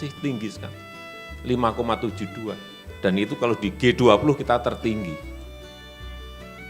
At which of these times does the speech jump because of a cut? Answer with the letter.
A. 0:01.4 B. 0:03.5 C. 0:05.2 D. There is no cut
D